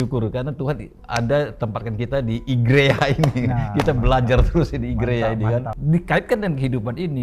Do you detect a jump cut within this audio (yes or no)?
yes